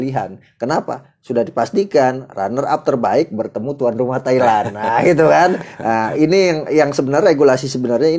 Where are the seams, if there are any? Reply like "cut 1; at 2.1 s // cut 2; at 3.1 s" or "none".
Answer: none